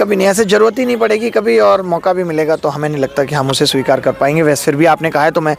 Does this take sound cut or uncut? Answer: uncut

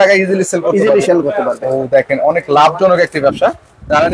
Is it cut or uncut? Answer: uncut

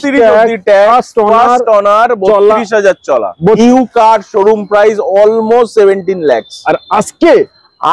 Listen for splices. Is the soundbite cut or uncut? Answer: cut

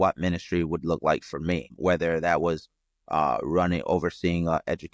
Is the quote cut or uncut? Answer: cut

